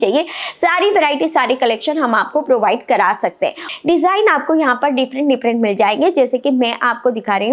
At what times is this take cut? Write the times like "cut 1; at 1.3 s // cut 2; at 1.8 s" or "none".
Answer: cut 1; at 3.6 s